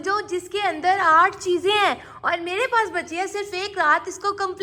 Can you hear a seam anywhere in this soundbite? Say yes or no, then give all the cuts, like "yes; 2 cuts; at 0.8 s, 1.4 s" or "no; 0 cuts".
no; 0 cuts